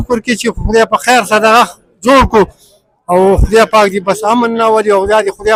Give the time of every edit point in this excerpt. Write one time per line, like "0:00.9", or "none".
none